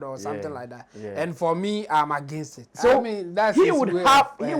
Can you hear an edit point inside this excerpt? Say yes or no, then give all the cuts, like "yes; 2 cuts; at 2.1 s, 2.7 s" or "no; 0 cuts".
yes; 1 cut; at 2.6 s